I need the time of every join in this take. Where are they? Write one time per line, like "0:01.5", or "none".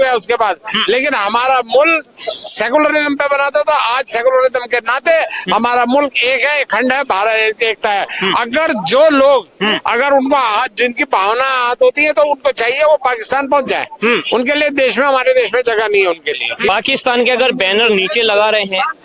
0:16.7